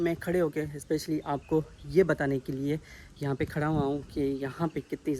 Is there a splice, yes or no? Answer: no